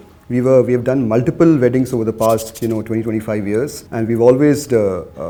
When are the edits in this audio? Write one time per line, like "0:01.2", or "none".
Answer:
none